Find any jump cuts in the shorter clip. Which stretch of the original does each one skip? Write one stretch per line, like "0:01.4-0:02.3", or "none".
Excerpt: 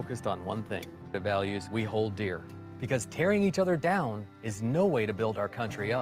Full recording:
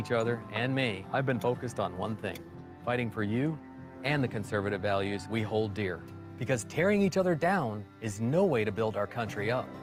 0:02.7-0:04.7